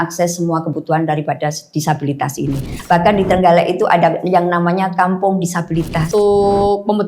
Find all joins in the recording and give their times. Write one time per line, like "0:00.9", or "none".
0:02.7
0:06.1